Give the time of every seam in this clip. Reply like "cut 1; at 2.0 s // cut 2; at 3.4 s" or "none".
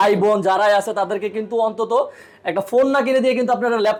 none

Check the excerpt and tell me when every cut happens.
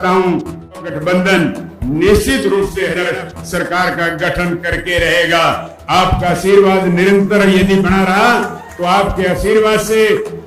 cut 1; at 0.8 s // cut 2; at 2.9 s

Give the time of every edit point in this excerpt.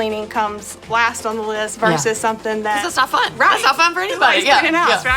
cut 1; at 2.8 s

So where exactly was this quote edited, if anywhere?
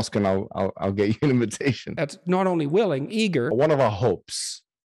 cut 1; at 1.9 s // cut 2; at 3.5 s

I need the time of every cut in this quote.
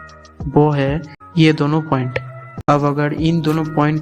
none

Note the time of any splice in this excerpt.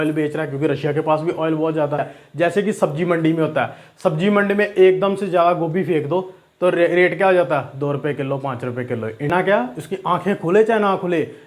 cut 1; at 2.2 s // cut 2; at 9.3 s

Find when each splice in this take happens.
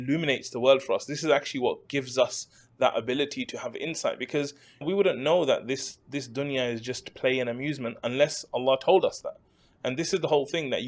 cut 1; at 4.8 s

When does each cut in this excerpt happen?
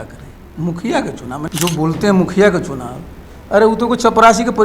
cut 1; at 1.4 s

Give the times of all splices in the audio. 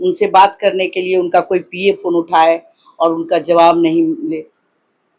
none

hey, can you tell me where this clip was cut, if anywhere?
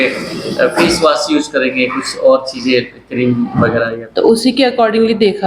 cut 1; at 3.9 s

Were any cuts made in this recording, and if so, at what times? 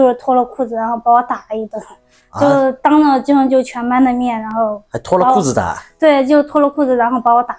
none

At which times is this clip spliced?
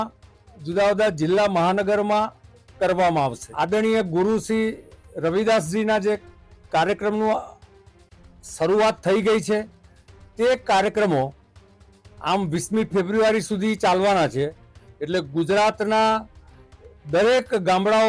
cut 1; at 3.4 s

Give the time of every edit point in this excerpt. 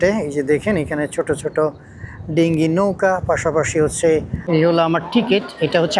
cut 1; at 4.4 s

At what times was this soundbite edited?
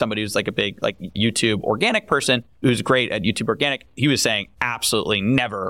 cut 1; at 1.1 s // cut 2; at 2.6 s // cut 3; at 4.0 s

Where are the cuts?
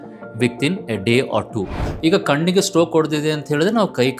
cut 1; at 1.8 s

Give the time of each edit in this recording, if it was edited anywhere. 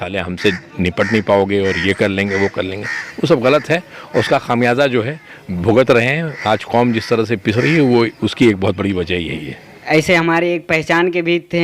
cut 1; at 9.8 s

